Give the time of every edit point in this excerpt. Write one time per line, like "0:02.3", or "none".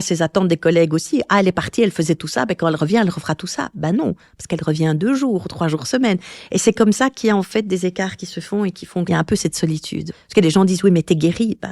0:09.1
0:10.2